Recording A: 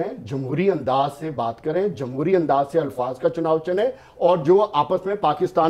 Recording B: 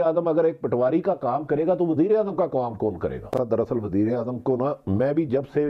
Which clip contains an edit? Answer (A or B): B